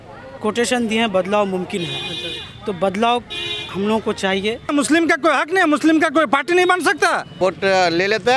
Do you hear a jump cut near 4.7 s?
yes; 2 cuts; at 4.7 s, 7.4 s

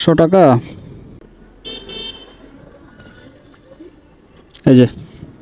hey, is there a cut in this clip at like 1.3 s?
yes; 1 cut; at 1.3 s

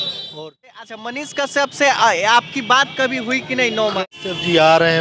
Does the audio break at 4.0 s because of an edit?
yes; 2 cuts; at 1.2 s, 4.0 s

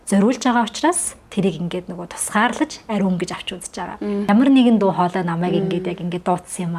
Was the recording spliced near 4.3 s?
yes; 1 cut; at 4.3 s

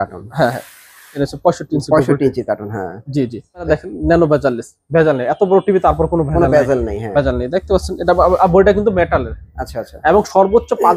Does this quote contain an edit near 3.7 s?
yes; 1 cut; at 3.7 s

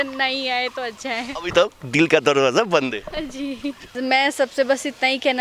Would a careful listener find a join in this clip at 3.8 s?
yes; 1 cut; at 3.8 s

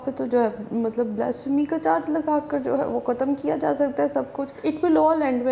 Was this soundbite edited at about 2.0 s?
no; 1 cut; at 4.5 s

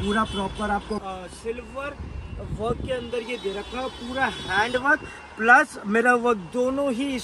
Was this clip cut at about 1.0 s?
yes; 1 cut; at 1.0 s

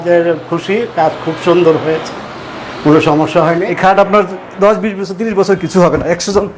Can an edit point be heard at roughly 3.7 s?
yes; 1 cut; at 3.7 s

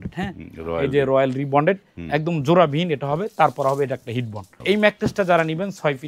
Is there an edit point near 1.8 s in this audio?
no; 1 cut; at 4.5 s

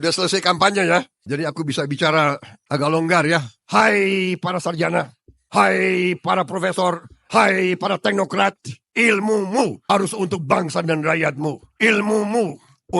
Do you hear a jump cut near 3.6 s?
yes; 2 cuts; at 2.5 s, 3.6 s

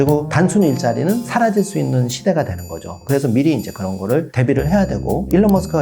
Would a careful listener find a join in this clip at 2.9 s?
yes; 2 cuts; at 1.3 s, 2.9 s

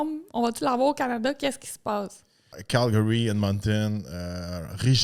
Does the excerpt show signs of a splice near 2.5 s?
yes; 1 cut; at 2.5 s

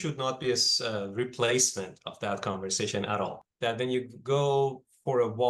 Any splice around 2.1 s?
no; 1 cut; at 3.4 s

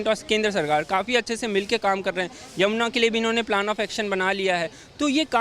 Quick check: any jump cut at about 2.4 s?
no; 0 cuts

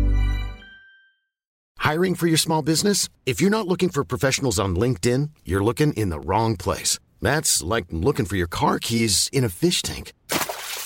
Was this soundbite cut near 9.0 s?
no; 1 cut; at 1.7 s

